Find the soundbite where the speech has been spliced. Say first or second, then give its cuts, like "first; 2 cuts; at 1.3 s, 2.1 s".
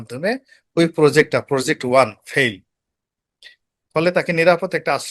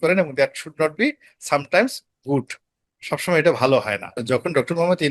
second; 1 cut; at 4.2 s